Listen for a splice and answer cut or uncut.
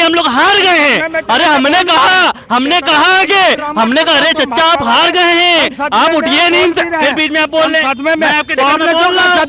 uncut